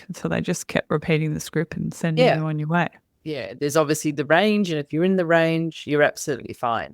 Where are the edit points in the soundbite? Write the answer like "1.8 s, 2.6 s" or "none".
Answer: 3.0 s